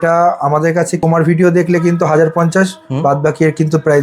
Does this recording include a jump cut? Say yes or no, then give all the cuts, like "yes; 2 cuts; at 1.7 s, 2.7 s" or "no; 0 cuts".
yes; 1 cut; at 1.0 s